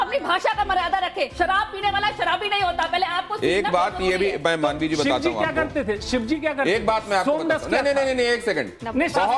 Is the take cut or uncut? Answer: uncut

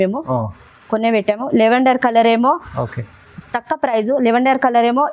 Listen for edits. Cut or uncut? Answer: uncut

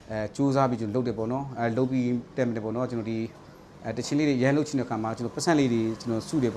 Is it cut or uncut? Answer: uncut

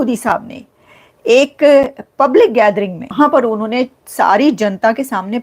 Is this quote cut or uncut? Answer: cut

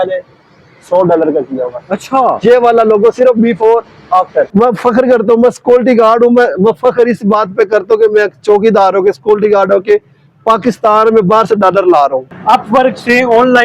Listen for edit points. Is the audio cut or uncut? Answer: cut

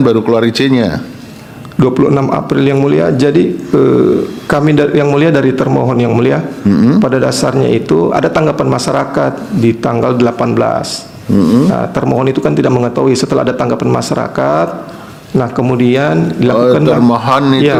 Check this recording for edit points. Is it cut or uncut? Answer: uncut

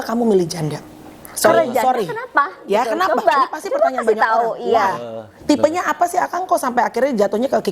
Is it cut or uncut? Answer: cut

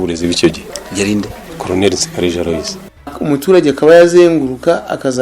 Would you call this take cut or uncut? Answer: cut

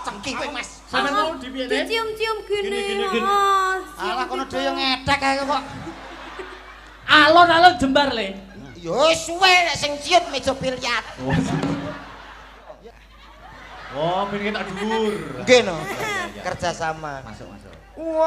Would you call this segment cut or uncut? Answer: cut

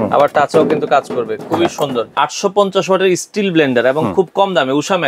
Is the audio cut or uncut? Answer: cut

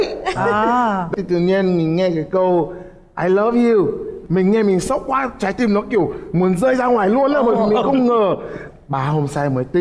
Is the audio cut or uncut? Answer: uncut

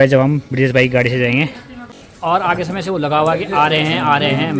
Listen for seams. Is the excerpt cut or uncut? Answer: uncut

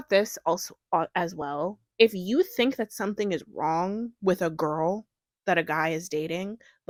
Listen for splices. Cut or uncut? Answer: uncut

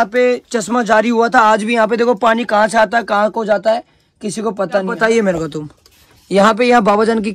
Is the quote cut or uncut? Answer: cut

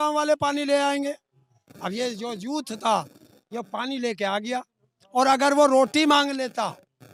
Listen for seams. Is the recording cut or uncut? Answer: uncut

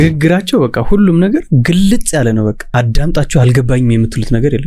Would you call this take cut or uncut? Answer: cut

